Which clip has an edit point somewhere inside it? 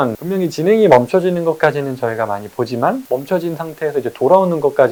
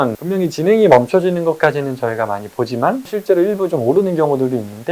second; 1 cut; at 3.1 s

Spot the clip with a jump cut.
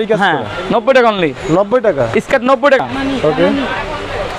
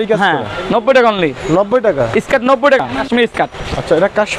second; 1 cut; at 3.0 s

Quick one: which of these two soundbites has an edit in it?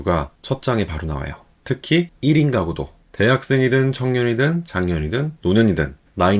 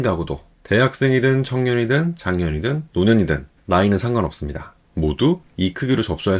first; 1 cut; at 1.5 s

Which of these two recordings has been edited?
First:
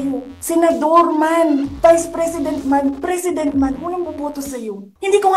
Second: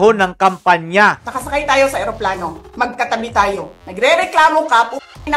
second; 1 cut; at 1.3 s

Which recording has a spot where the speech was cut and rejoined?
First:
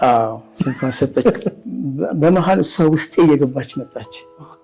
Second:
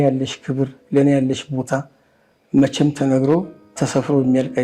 first; 1 cut; at 1.6 s

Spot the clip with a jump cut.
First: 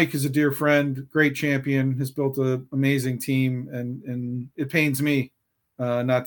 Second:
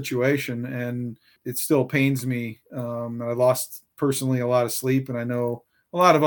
second; 1 cut; at 1.5 s

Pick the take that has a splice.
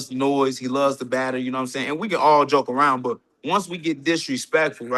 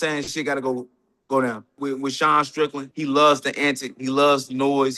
second; 2 cuts; at 1.8 s, 2.8 s

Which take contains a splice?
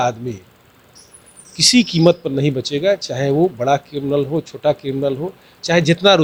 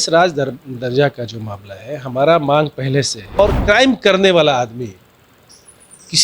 second; 1 cut; at 3.4 s

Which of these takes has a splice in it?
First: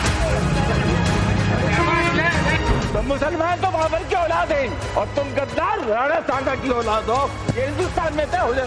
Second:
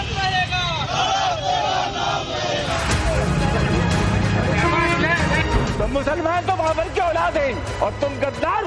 first; 1 cut; at 7.4 s

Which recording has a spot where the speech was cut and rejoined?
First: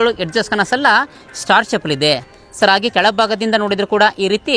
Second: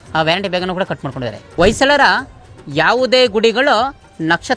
second; 1 cut; at 1.4 s

